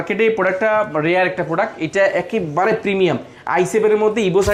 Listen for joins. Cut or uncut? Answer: uncut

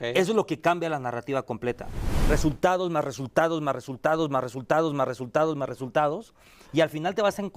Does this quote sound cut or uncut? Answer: cut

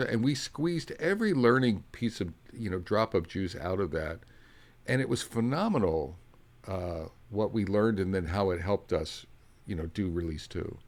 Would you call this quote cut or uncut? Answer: uncut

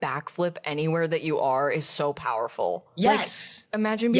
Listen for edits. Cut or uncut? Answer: cut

